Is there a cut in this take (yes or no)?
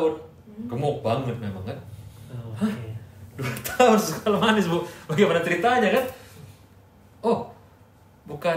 no